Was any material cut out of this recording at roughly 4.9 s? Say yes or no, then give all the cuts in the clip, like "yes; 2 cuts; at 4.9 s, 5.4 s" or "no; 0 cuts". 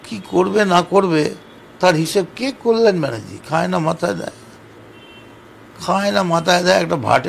no; 0 cuts